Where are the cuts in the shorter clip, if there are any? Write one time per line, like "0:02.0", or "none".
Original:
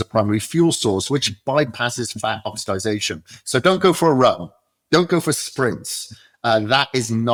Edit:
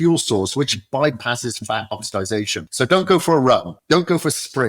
0:02.6
0:03.7